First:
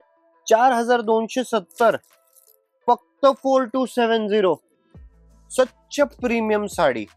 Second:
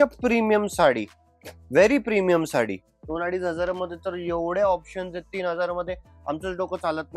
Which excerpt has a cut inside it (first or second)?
second